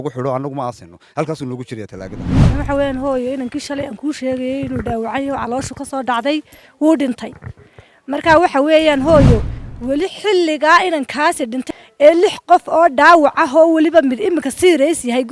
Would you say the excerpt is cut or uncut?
cut